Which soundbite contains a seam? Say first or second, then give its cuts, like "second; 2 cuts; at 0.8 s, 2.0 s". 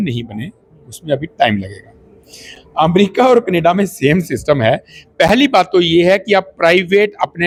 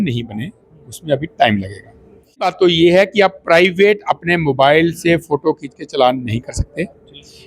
second; 1 cut; at 2.5 s